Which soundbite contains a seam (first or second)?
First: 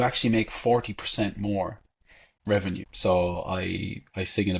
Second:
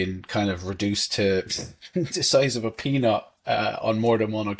first